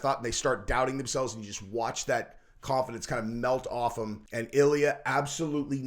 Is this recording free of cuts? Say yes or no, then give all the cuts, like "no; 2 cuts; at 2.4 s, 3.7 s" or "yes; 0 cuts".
no; 1 cut; at 4.2 s